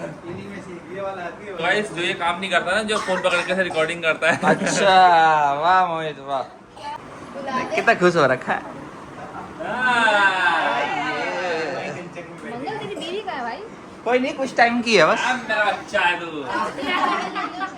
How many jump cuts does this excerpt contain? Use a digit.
2